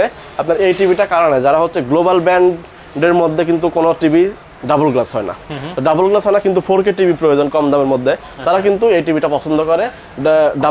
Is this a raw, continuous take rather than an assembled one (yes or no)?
yes